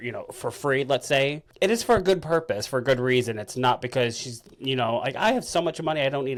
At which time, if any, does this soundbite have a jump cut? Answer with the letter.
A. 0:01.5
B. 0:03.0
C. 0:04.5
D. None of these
D